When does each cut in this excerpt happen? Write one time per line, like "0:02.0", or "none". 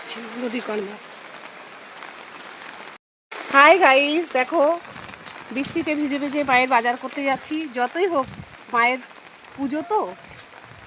0:03.5